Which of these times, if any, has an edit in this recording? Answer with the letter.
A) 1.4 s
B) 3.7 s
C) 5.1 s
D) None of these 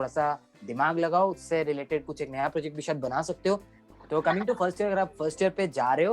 B